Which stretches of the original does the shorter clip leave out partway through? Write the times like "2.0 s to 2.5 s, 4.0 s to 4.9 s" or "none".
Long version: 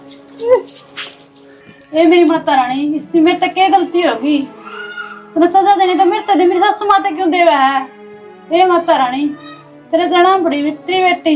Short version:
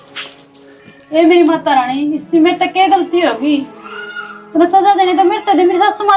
none